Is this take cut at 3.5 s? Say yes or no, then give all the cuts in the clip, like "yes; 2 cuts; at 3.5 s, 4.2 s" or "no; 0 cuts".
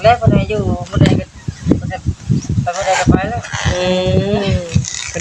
no; 0 cuts